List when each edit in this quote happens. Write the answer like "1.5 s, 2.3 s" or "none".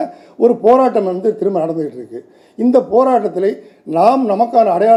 none